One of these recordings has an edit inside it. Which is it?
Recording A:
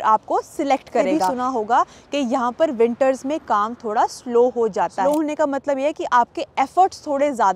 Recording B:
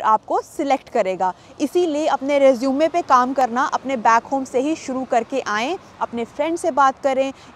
A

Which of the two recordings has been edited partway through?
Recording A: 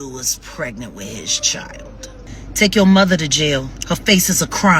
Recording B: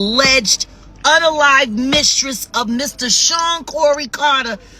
A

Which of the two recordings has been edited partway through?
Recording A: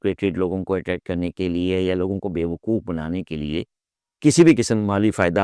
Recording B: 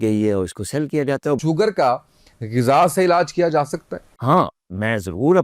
B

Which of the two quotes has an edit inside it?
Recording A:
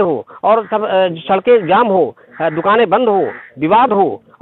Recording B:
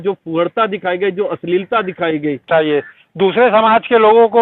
B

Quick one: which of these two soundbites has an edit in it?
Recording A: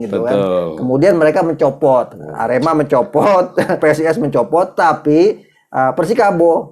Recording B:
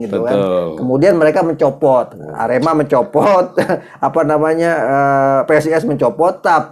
A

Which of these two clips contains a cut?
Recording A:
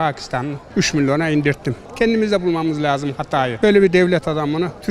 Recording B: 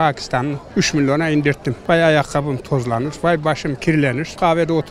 A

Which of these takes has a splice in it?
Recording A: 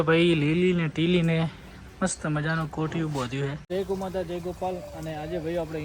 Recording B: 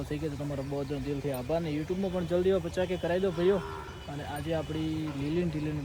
A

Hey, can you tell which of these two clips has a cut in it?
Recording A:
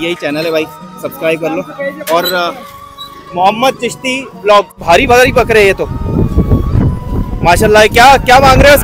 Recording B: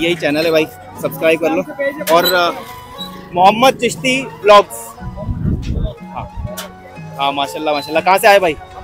A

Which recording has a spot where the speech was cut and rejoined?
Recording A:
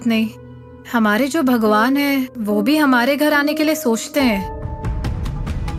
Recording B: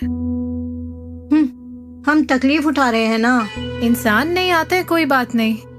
B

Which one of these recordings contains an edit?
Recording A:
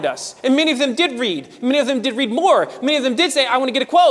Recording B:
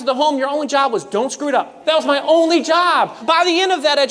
B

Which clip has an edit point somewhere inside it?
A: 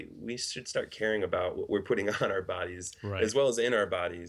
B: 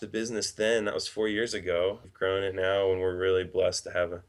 B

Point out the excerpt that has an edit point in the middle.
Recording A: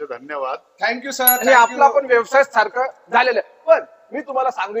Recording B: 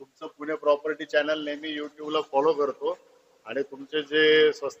A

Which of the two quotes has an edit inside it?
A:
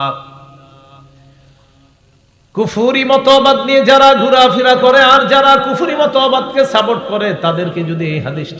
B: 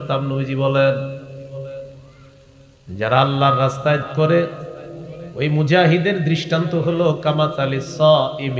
B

